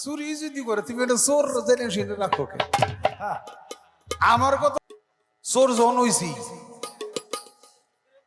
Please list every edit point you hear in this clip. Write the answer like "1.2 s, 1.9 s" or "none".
4.7 s